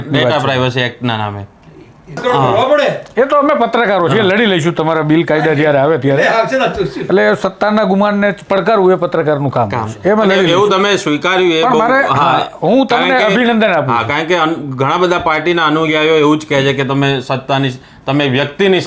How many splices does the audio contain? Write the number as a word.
one